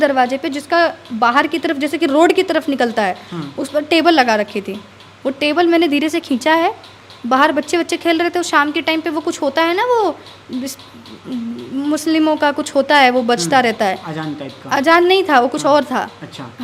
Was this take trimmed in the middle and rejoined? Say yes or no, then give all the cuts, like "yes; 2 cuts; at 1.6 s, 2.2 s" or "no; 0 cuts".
no; 0 cuts